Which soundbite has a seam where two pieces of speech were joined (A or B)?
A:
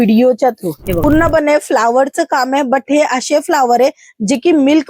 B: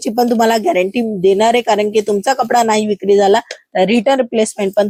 A